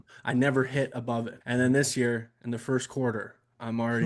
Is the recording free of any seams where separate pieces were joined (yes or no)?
no